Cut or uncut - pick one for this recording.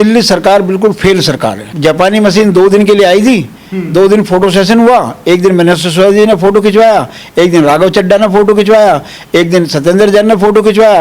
cut